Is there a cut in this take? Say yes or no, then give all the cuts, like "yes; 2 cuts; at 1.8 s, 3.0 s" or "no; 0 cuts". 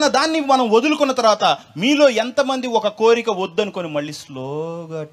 no; 0 cuts